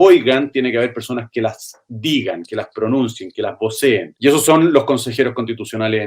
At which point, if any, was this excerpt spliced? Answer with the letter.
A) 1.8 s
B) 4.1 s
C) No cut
B